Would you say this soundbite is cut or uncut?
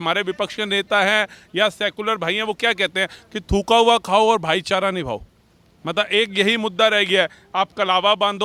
uncut